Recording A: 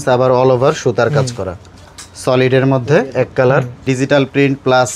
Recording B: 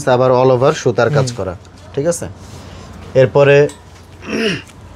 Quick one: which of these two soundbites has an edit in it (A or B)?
A